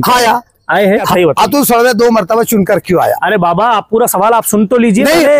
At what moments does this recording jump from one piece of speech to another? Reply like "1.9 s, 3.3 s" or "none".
1.1 s